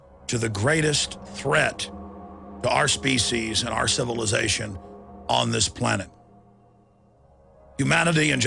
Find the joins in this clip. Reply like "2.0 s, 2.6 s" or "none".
none

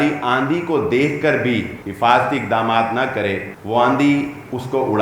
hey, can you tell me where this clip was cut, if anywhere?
1.8 s, 3.5 s

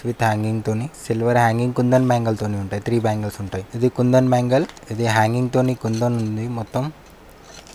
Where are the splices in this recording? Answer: 0.9 s, 3.7 s, 4.8 s

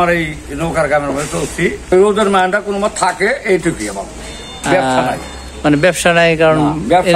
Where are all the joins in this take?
1.9 s

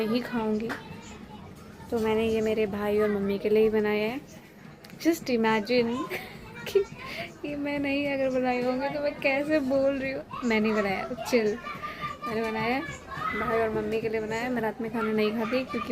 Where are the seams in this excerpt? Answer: 13.0 s

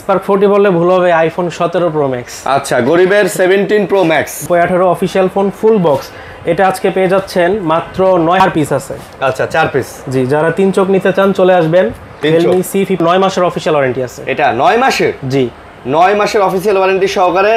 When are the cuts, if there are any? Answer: 4.4 s, 8.4 s, 13.0 s

